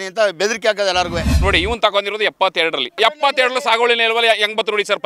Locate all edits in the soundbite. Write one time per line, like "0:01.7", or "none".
0:01.3
0:03.0

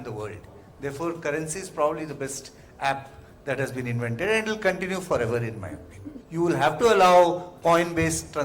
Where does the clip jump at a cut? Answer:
0:06.2

